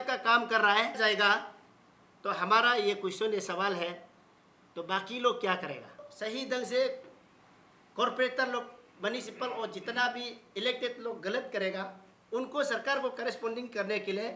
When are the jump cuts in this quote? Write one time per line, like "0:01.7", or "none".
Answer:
0:01.0
0:06.1